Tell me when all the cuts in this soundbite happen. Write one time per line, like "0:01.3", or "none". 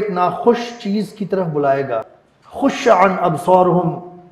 0:02.2

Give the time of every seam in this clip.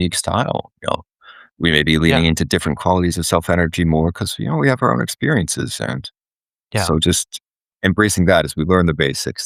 none

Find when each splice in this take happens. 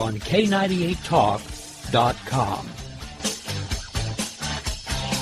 none

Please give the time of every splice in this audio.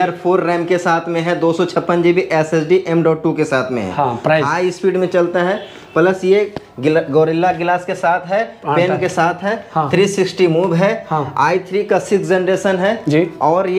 none

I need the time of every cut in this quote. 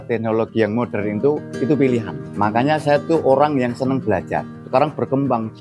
0:01.5
0:02.3
0:04.4

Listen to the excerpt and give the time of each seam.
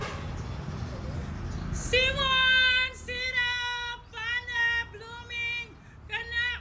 none

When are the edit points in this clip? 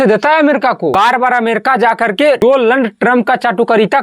0:00.9
0:02.4

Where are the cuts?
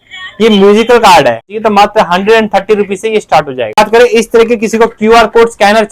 0:01.5
0:03.8

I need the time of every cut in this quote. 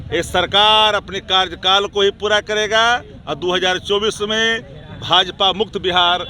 none

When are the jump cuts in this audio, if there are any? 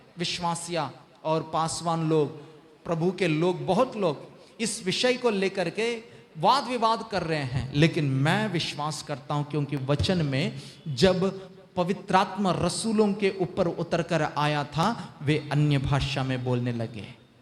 none

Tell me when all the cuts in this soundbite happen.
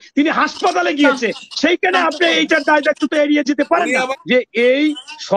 0:04.1

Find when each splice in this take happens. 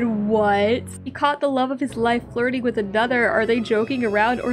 0:00.9

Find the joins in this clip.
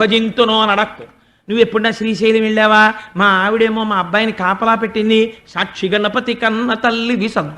none

